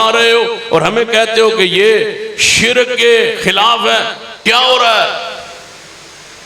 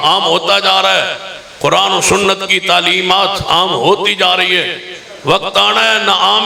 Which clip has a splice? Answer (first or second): first